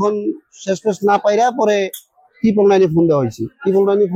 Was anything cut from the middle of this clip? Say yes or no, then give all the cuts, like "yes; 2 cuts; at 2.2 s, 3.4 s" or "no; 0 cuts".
no; 0 cuts